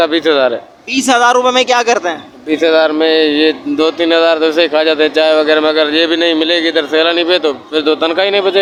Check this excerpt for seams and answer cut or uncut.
uncut